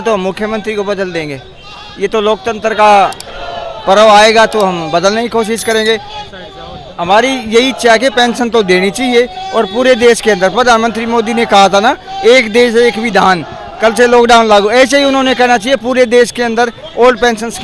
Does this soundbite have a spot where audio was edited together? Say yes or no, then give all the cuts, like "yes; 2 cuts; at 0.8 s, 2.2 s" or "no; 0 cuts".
no; 0 cuts